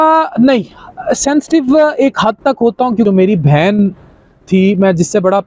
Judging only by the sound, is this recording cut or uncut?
cut